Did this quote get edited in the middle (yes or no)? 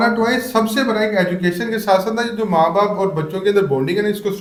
no